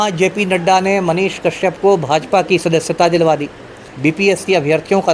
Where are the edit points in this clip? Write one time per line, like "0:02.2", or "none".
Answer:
0:03.9